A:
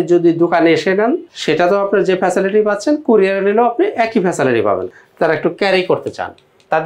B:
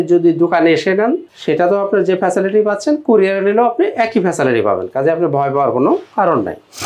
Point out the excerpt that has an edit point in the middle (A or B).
A